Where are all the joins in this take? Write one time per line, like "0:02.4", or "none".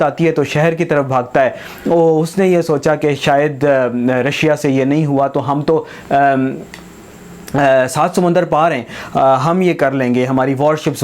none